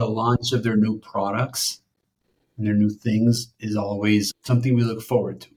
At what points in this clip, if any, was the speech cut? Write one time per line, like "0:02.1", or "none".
none